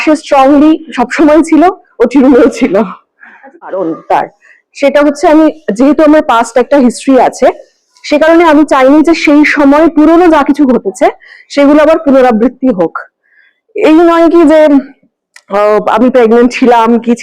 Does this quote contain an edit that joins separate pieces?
yes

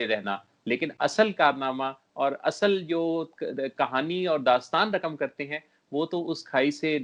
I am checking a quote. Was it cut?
no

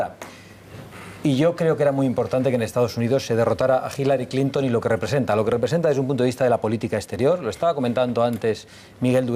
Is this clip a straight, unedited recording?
yes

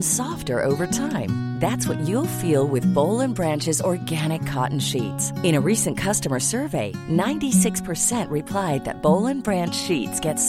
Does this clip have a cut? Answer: no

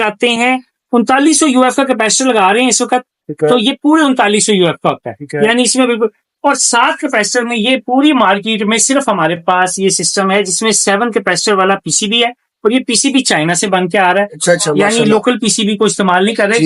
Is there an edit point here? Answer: no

